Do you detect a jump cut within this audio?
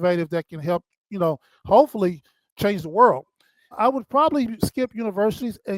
yes; 2 cuts; at 2.5 s, 3.8 s

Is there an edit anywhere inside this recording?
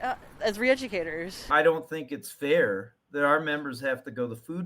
yes; 1 cut; at 1.5 s

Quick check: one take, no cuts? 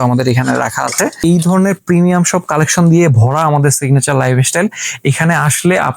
no; 1 cut; at 1.2 s

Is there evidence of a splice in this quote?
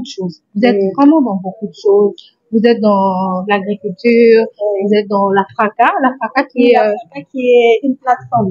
no; 0 cuts

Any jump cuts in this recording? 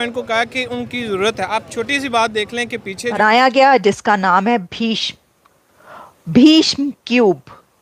yes; 1 cut; at 3.2 s

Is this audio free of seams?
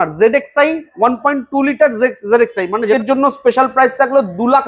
no; 1 cut; at 3.0 s

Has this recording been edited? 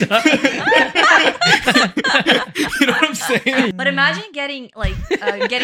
yes; 1 cut; at 3.7 s

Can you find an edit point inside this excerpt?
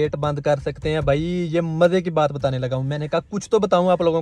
no; 0 cuts

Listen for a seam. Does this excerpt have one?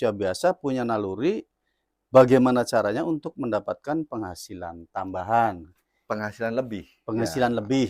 no; 0 cuts

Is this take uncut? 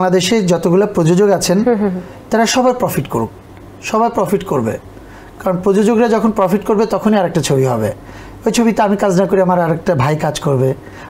yes; 0 cuts

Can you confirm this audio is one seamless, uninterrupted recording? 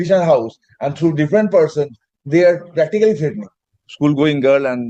no; 1 cut; at 3.9 s

